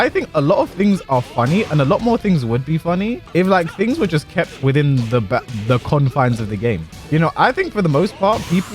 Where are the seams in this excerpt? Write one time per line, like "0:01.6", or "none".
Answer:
0:03.2
0:06.9